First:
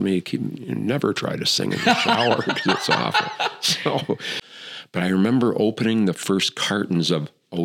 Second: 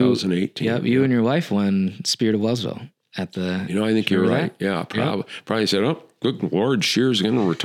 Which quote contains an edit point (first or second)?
first